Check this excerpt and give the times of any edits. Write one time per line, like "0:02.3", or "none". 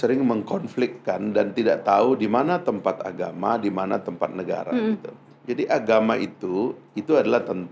none